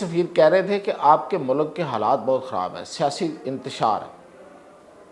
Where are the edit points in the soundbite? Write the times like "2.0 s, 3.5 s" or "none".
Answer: none